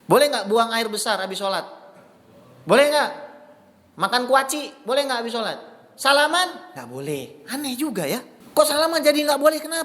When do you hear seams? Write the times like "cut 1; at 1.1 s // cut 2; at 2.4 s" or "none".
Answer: cut 1; at 8.4 s